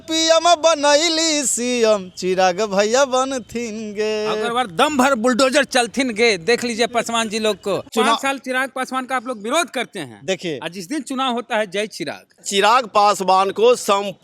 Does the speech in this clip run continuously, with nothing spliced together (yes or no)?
no